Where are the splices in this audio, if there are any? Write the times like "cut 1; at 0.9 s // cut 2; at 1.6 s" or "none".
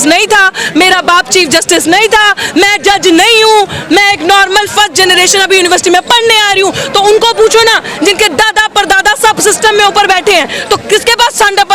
none